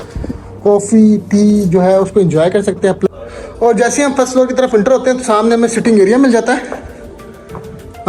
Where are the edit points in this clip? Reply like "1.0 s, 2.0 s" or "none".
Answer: 3.1 s

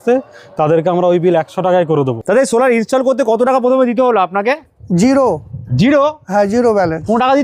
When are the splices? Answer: 2.2 s

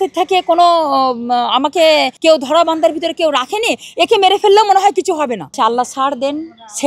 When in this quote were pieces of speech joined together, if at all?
2.1 s, 5.5 s

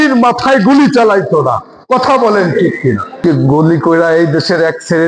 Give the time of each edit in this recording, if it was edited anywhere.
3.2 s

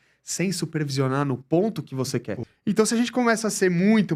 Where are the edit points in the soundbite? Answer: 2.4 s

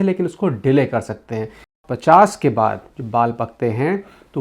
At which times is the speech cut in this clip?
1.7 s

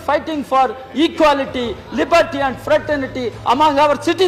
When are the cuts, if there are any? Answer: none

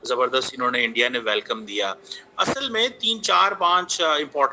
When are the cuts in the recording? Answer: none

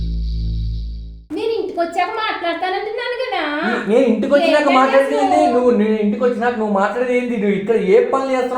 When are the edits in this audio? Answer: 1.2 s

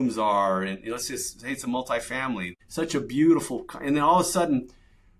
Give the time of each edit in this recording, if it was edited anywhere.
2.6 s

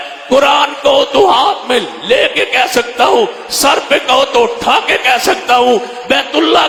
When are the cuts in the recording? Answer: none

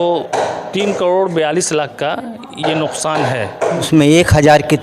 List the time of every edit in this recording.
3.9 s

